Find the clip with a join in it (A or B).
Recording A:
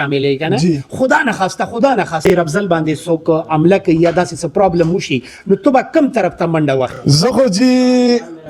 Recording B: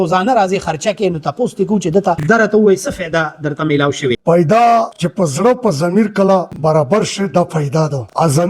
B